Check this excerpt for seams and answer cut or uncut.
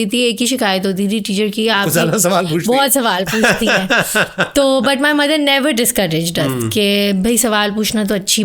uncut